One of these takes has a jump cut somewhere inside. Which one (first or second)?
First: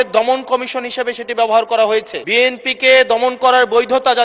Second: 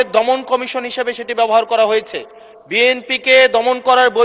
first